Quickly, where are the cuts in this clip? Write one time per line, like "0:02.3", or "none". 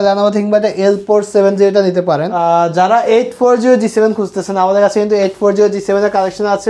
0:02.3